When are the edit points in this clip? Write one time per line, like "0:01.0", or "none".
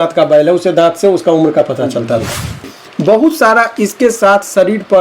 0:02.5